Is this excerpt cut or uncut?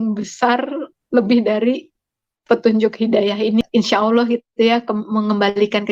cut